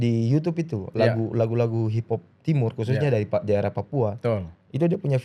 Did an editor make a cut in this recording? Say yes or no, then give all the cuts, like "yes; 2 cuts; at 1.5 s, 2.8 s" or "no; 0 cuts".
no; 0 cuts